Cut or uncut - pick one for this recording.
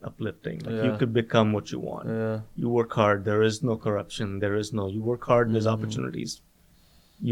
uncut